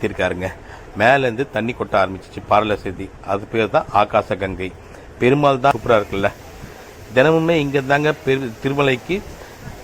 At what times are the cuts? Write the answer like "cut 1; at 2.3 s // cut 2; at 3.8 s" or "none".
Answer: cut 1; at 5.7 s